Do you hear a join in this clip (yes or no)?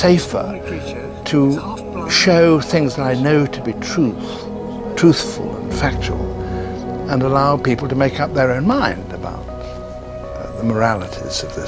no